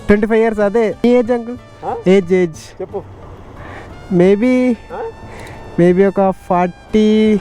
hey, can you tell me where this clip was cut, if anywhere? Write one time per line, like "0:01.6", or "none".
0:01.0